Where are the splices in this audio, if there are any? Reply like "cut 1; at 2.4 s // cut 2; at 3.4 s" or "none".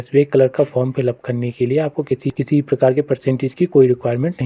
cut 1; at 2.3 s